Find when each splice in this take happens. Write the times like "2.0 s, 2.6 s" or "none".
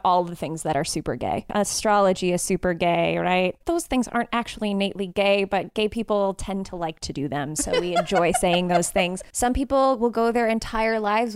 1.5 s, 3.6 s, 9.2 s